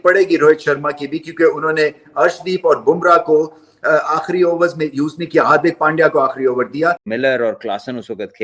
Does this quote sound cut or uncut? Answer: cut